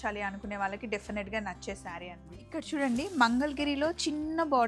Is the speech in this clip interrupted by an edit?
yes; 1 cut; at 2.3 s

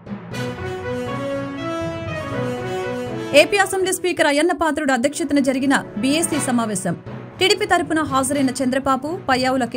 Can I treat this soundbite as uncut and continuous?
no; 1 cut; at 3.3 s

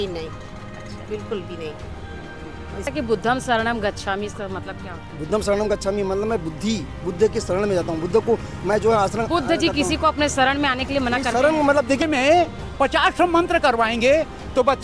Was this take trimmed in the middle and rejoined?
yes; 2 cuts; at 2.9 s, 12.0 s

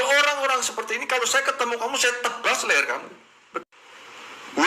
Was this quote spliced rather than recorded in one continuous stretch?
yes; 1 cut; at 3.6 s

